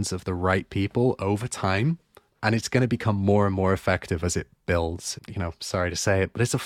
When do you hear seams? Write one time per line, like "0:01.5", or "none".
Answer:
0:05.1